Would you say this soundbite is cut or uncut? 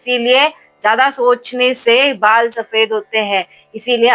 uncut